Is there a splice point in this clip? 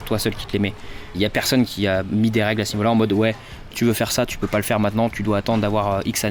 no; 0 cuts

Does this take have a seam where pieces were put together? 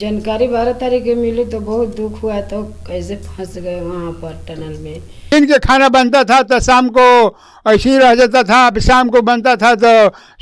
yes; 1 cut; at 5.3 s

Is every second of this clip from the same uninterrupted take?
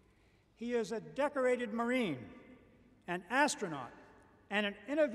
yes; 0 cuts

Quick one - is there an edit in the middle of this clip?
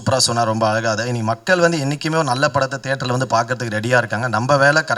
no; 0 cuts

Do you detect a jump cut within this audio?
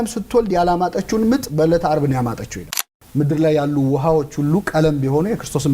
yes; 1 cut; at 2.7 s

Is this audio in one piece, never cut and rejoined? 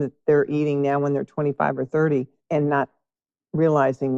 no; 1 cut; at 2.4 s

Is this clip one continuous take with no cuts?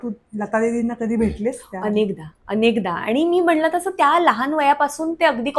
yes; 0 cuts

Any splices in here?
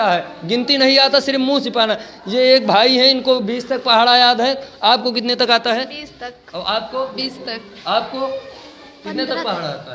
no; 0 cuts

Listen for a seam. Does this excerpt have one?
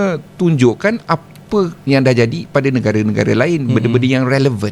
no; 0 cuts

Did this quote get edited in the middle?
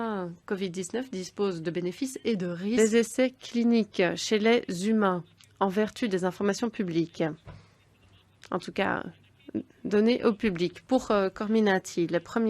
yes; 1 cut; at 2.8 s

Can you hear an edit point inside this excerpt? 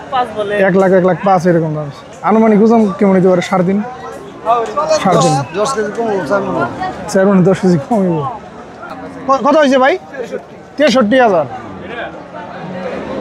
no; 0 cuts

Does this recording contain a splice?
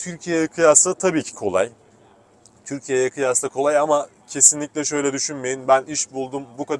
no; 0 cuts

